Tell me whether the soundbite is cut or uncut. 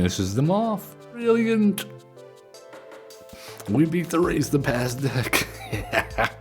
cut